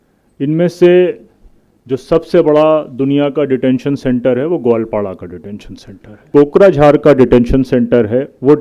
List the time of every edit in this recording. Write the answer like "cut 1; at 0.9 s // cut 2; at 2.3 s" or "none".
cut 1; at 6.2 s